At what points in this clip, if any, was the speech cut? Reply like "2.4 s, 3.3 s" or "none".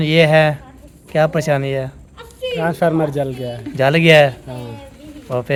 none